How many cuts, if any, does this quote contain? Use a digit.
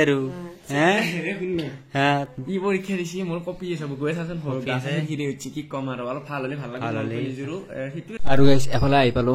1